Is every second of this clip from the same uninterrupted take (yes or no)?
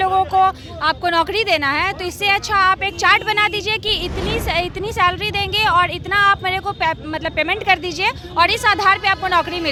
yes